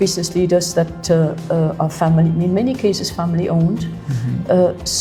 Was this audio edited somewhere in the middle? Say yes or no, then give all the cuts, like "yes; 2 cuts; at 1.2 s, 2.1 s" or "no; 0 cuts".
no; 0 cuts